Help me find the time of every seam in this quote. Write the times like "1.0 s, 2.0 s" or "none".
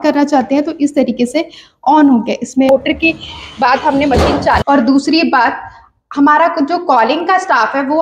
2.7 s, 4.6 s